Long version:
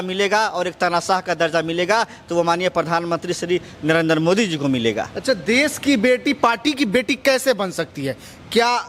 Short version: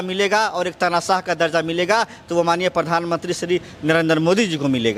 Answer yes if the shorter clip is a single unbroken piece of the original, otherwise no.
yes